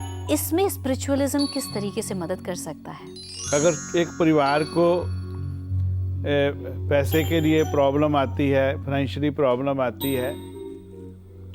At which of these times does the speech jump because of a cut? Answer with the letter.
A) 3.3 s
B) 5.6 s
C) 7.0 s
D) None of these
A